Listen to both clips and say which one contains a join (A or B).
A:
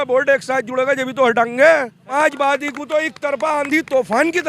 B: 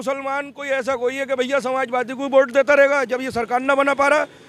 A